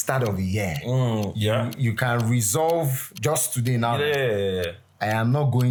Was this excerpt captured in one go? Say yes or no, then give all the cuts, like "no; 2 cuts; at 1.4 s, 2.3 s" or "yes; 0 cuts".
yes; 0 cuts